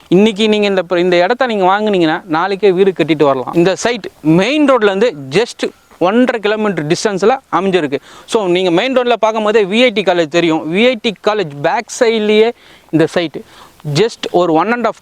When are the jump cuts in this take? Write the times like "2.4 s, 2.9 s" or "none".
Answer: 3.4 s